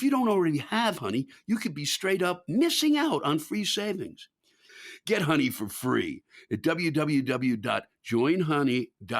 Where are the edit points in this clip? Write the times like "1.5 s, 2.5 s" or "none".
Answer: 4.6 s